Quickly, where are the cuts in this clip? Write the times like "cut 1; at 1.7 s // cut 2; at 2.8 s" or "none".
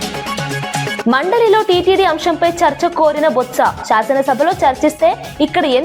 none